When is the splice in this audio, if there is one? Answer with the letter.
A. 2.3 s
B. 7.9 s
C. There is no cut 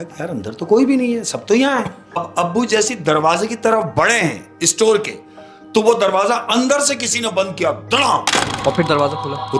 A